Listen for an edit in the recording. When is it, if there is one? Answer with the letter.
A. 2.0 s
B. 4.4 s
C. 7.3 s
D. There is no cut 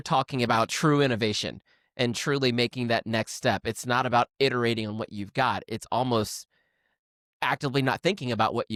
D